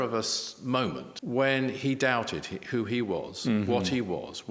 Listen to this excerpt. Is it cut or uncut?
cut